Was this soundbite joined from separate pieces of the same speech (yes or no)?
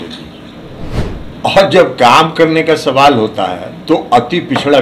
yes